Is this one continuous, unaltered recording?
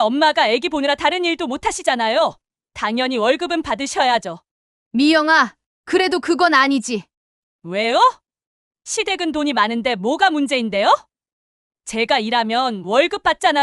yes; 0 cuts

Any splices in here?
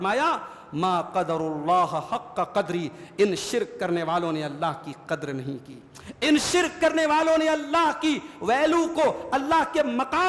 no; 0 cuts

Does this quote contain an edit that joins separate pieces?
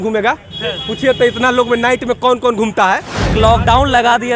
yes; 1 cut; at 3.3 s

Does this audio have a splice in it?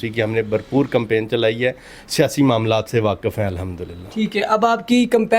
no; 0 cuts

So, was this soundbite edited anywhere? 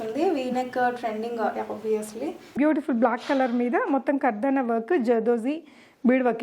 yes; 1 cut; at 2.4 s

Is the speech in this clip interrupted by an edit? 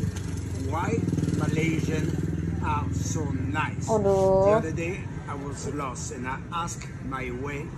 no; 0 cuts

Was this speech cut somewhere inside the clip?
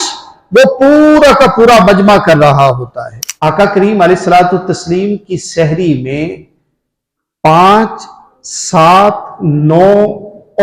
yes; 1 cut; at 3.2 s

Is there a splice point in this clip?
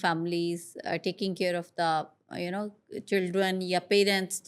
no; 0 cuts

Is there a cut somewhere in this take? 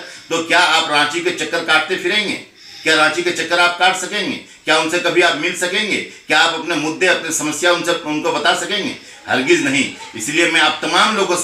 no; 0 cuts

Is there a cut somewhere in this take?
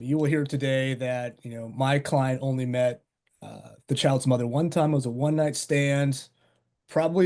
no; 0 cuts

